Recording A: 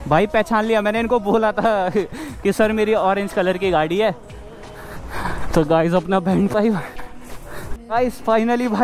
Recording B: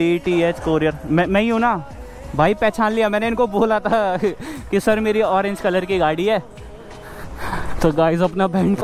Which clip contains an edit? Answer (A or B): A